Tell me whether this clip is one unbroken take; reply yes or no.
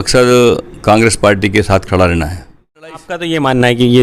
no